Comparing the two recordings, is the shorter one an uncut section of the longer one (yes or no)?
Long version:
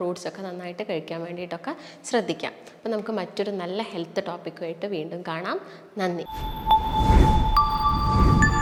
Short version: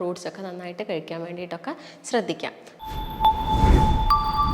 no